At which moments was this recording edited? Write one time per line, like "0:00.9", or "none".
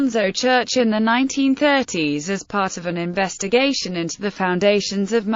none